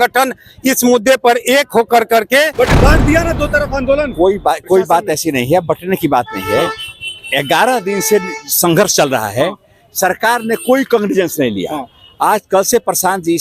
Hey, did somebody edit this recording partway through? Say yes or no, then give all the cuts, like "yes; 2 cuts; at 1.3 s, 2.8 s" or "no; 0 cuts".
yes; 1 cut; at 2.5 s